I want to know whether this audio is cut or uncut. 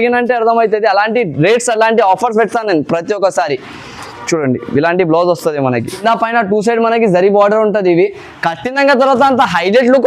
cut